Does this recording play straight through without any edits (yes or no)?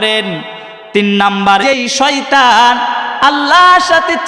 no